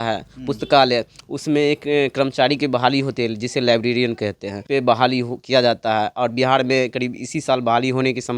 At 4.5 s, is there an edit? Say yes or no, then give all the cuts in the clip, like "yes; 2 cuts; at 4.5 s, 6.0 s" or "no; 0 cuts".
yes; 1 cut; at 4.5 s